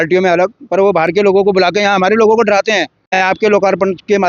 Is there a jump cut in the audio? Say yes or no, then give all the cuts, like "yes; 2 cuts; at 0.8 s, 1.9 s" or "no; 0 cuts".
yes; 1 cut; at 3.0 s